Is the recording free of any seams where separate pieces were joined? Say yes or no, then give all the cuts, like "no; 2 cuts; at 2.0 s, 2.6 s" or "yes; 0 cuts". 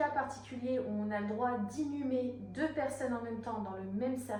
yes; 0 cuts